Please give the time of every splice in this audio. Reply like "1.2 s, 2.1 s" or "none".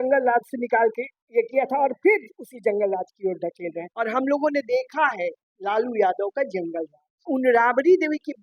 3.9 s, 7.2 s